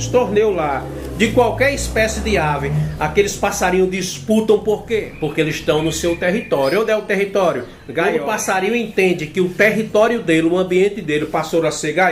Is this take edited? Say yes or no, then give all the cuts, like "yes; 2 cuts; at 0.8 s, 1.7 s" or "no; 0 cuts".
yes; 2 cuts; at 5.0 s, 8.1 s